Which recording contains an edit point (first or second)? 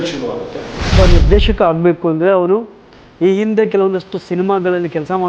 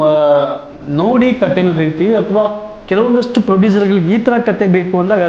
first